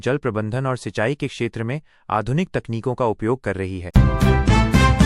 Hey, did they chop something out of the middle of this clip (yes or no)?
yes